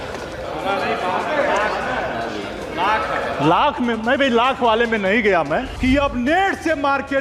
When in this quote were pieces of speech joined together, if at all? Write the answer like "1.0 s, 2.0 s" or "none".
5.7 s

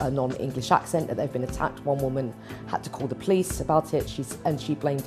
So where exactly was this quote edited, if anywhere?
none

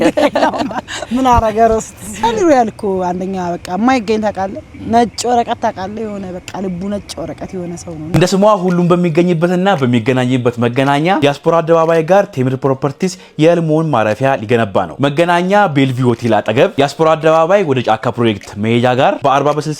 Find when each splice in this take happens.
2.0 s, 8.1 s

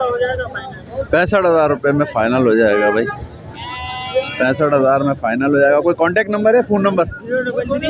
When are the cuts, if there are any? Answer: none

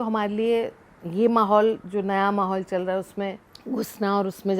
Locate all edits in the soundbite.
3.5 s

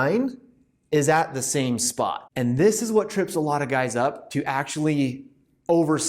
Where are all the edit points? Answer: 2.2 s

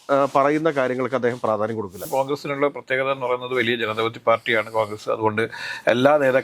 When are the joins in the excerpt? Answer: 2.0 s

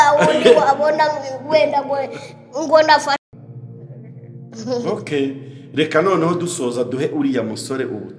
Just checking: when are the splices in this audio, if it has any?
3.2 s

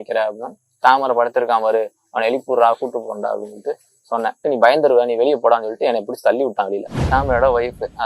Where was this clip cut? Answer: 4.4 s, 6.9 s

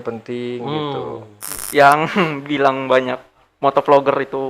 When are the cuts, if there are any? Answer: 1.6 s

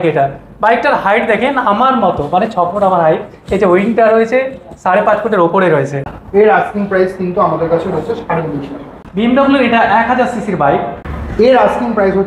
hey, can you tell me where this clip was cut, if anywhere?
6.1 s, 9.1 s, 11.0 s

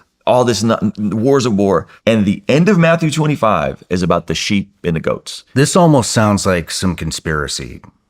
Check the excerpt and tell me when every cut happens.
1.9 s, 5.3 s

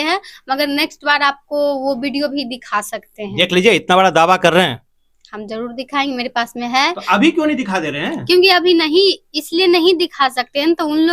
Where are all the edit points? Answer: none

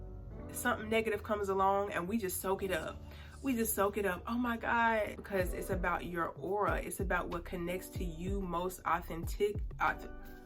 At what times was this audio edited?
5.2 s

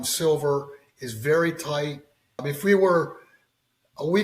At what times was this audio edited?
2.5 s

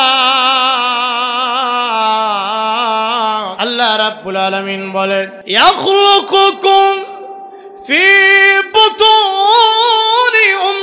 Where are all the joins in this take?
3.5 s, 5.4 s

